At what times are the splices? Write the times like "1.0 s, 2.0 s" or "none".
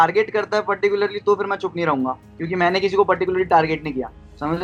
none